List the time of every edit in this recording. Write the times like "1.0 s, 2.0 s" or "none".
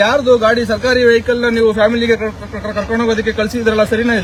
none